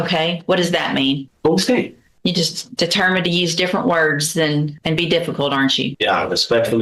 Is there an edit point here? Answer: yes; 4 cuts; at 1.3 s, 2.0 s, 4.8 s, 5.9 s

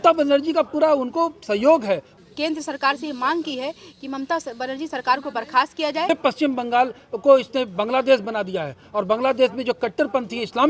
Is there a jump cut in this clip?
yes; 2 cuts; at 2.1 s, 6.1 s

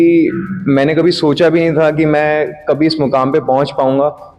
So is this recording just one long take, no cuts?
yes; 0 cuts

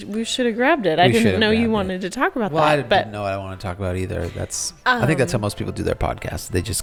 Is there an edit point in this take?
no; 0 cuts

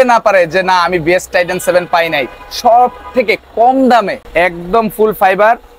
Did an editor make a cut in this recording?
yes; 1 cut; at 4.2 s

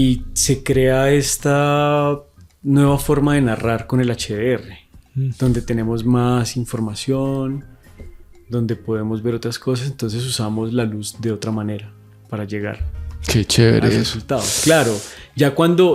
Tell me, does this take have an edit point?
no; 0 cuts

